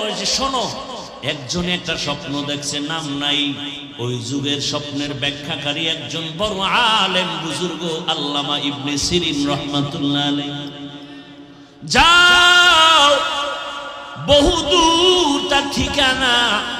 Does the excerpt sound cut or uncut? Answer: cut